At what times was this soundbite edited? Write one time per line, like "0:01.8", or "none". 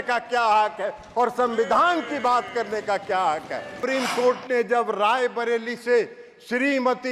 0:03.8